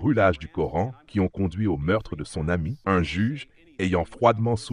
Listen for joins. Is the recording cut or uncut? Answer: cut